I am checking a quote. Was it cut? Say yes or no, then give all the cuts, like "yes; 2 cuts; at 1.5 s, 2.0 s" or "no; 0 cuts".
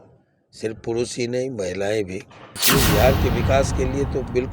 yes; 1 cut; at 2.6 s